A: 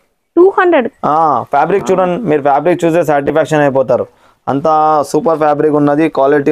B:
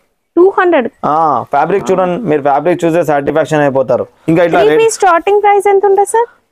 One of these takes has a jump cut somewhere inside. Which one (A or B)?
B